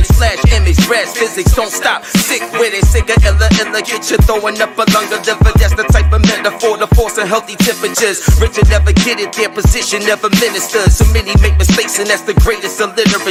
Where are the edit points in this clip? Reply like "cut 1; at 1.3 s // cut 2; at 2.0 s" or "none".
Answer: none